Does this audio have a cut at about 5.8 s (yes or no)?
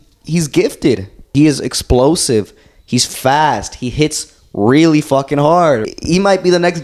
yes